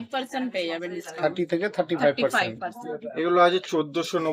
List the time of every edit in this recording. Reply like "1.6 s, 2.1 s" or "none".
none